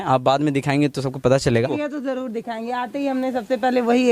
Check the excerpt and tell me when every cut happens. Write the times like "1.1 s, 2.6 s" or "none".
1.7 s